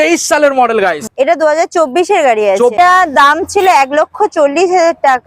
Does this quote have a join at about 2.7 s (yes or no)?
yes